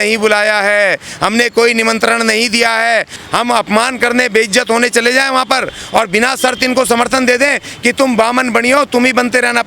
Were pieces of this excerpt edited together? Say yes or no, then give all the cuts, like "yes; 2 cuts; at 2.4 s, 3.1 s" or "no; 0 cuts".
yes; 1 cut; at 3.1 s